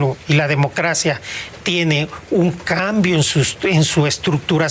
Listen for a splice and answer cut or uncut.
uncut